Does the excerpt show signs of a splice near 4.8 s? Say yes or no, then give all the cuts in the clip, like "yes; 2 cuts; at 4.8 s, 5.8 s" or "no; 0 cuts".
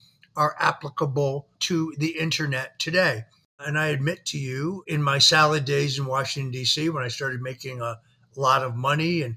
yes; 3 cuts; at 1.5 s, 3.6 s, 4.8 s